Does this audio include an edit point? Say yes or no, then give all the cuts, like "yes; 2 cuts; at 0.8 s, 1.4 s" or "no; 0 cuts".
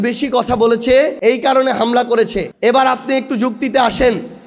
yes; 2 cuts; at 1.1 s, 2.4 s